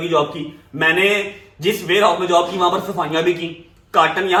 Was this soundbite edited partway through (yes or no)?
no